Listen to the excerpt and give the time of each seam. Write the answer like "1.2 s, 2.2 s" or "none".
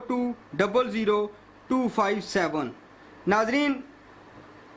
none

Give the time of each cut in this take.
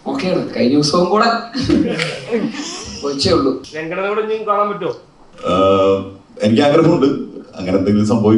3.7 s

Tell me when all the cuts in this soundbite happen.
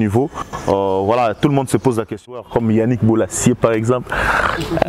2.4 s

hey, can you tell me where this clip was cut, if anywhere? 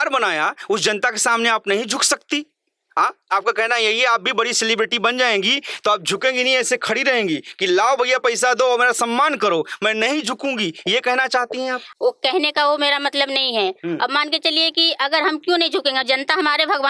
none

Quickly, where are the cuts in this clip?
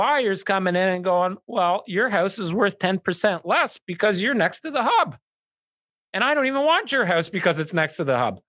none

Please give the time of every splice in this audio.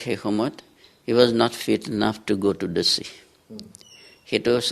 none

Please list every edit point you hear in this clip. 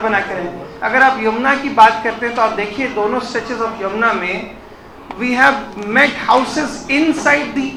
none

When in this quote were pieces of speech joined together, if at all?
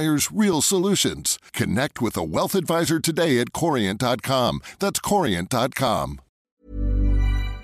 6.3 s

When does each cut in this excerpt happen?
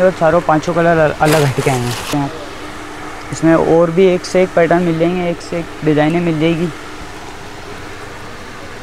2.1 s

